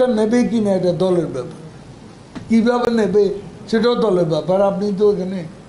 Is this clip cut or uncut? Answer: uncut